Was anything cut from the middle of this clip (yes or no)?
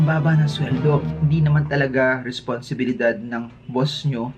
no